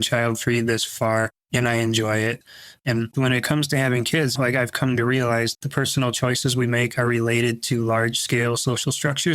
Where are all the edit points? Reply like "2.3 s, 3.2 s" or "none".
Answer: 3.0 s, 4.3 s, 5.6 s